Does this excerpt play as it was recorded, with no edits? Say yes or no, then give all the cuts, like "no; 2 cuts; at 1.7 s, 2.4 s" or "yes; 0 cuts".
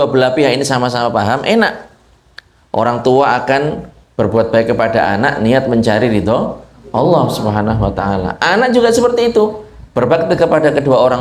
yes; 0 cuts